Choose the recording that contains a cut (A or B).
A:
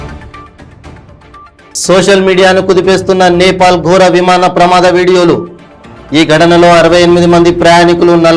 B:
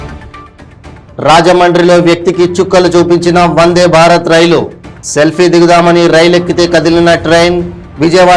A